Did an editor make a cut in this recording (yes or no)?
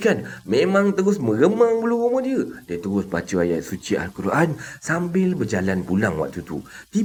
no